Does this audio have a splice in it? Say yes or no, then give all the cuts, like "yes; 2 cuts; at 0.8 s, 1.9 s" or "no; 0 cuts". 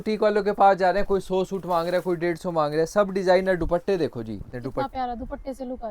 yes; 1 cut; at 4.6 s